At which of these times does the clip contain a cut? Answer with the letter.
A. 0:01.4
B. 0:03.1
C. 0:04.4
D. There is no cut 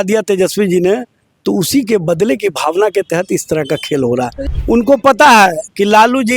C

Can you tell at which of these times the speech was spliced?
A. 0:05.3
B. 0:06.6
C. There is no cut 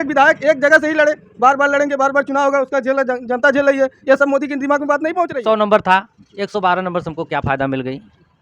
A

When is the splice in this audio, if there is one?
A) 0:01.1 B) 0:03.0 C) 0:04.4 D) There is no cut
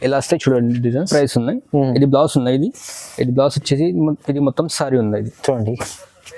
A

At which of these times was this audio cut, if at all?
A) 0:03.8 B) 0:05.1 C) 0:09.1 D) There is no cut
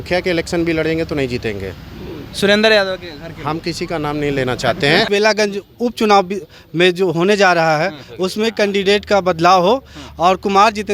B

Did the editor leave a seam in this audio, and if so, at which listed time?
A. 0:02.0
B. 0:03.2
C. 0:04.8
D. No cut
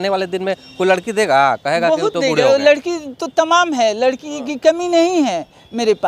D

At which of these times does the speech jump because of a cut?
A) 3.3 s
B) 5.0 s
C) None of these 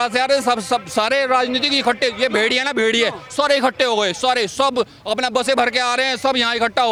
C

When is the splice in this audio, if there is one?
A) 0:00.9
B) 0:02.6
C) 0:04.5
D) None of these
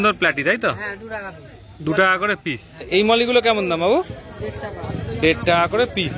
B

